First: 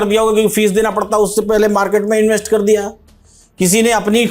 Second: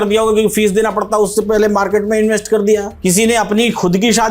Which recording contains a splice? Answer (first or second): second